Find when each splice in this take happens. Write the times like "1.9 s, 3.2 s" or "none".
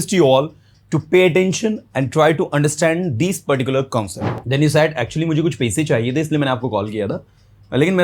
4.2 s